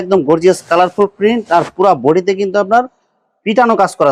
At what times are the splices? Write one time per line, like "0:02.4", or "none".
none